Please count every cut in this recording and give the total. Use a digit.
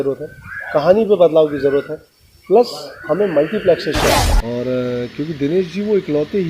1